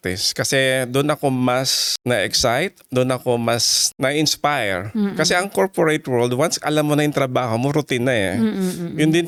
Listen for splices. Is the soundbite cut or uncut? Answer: uncut